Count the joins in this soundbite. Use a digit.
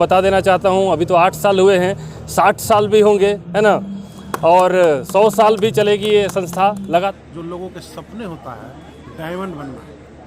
1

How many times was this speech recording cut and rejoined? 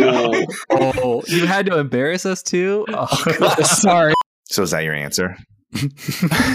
1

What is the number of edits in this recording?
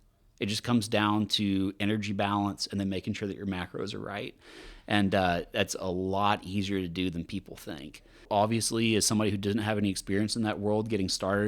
1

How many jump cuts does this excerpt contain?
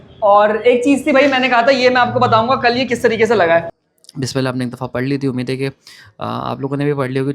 1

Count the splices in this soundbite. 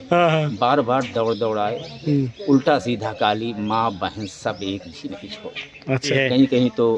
1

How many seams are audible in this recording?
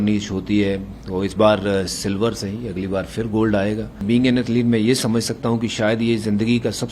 1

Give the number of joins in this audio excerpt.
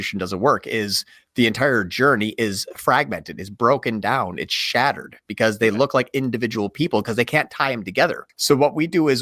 1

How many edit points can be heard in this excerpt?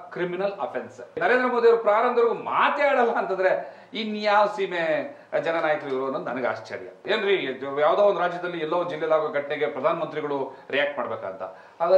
2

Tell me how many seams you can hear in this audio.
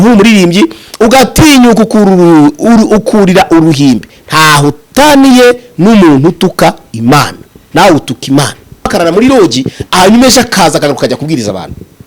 1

